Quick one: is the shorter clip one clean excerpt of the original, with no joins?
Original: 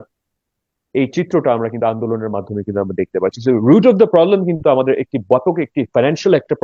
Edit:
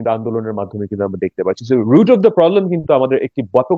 yes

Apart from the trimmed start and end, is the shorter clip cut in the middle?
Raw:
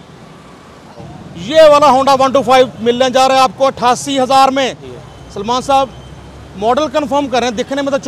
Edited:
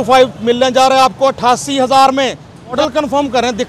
yes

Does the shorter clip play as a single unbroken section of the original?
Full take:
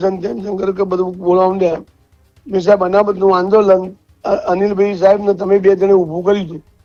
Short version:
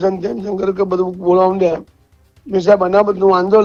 yes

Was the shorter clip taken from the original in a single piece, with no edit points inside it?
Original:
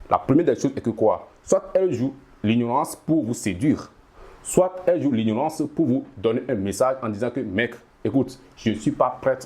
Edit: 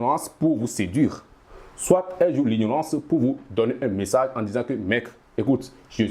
yes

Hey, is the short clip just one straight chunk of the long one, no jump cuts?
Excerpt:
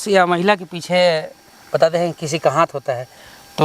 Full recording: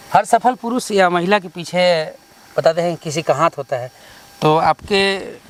yes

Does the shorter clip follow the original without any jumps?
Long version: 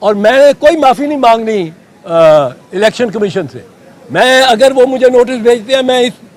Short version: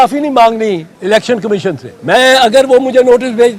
no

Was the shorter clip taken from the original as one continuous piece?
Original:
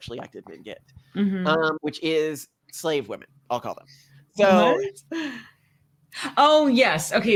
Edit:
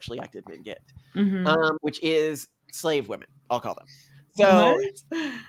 yes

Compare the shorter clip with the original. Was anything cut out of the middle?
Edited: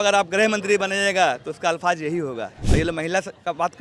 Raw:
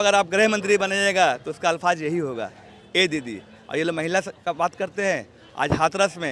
yes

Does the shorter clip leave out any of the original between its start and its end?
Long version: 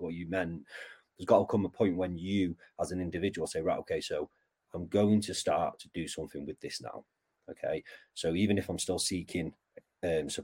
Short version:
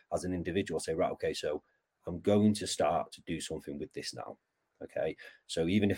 no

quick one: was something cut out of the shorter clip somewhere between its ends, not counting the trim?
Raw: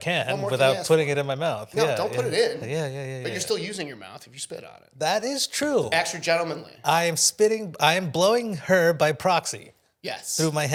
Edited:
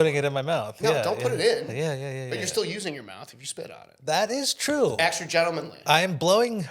yes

